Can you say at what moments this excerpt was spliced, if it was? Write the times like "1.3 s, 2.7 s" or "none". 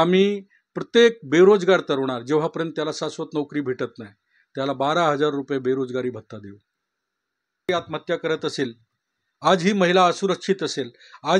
7.7 s